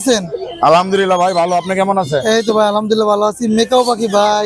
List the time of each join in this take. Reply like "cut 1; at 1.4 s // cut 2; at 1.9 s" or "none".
none